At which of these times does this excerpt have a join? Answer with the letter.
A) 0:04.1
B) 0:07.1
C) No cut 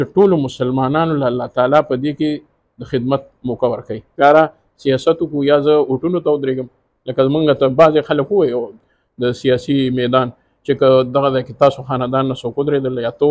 A